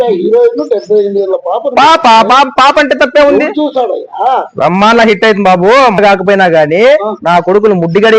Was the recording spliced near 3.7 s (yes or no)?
no